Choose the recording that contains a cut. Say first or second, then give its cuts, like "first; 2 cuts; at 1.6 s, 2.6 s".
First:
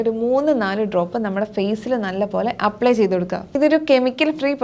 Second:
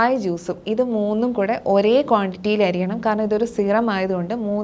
first; 1 cut; at 3.5 s